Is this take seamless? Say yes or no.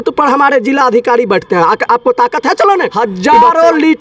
no